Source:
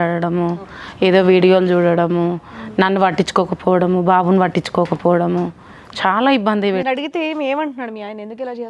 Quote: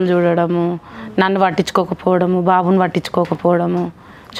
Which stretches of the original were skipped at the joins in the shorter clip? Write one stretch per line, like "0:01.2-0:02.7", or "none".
none